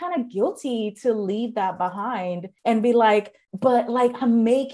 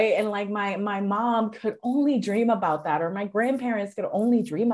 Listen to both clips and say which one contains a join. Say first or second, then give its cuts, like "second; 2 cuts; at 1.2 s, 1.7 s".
first; 2 cuts; at 2.5 s, 3.4 s